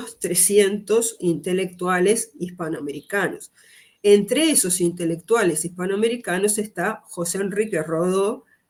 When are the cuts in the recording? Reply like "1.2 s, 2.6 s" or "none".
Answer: none